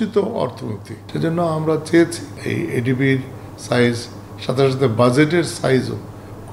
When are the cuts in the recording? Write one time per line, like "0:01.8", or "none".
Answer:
0:01.0
0:02.3